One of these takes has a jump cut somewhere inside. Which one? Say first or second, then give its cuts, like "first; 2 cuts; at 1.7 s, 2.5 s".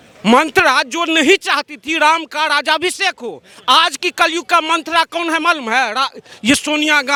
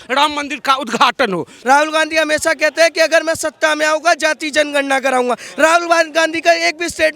second; 1 cut; at 1.5 s